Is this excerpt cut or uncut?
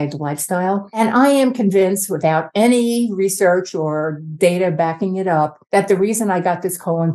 cut